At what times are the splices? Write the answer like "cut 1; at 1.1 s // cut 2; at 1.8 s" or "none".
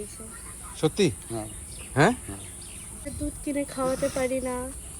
cut 1; at 3.1 s

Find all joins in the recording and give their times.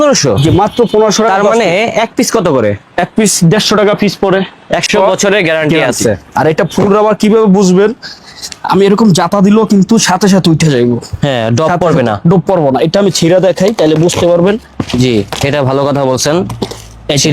cut 1; at 4.8 s

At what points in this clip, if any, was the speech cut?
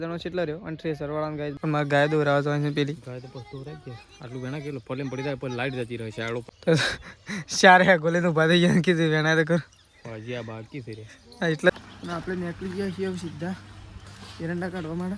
cut 1; at 1.5 s // cut 2; at 6.4 s // cut 3; at 11.7 s

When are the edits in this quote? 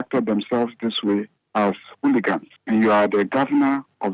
cut 1; at 1.4 s // cut 2; at 2.5 s

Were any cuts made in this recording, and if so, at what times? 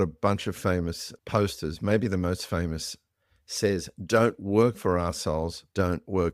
cut 1; at 1.1 s

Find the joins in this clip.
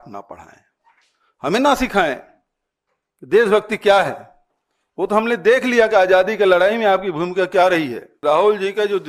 cut 1; at 8.1 s

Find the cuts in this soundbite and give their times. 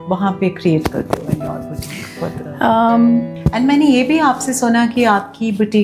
cut 1; at 3.3 s

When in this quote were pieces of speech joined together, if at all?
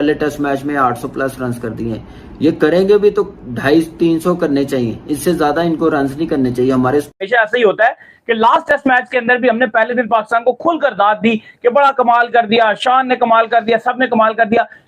cut 1; at 2.2 s // cut 2; at 7.2 s

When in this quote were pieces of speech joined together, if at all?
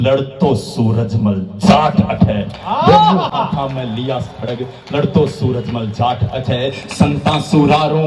none

